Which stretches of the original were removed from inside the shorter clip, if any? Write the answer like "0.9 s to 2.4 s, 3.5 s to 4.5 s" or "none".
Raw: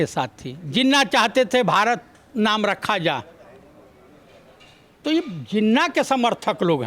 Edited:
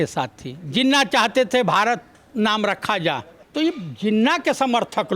3.4 s to 4.9 s